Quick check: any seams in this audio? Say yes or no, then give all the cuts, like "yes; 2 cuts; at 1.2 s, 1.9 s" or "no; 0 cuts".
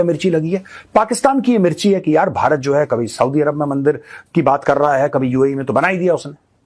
no; 0 cuts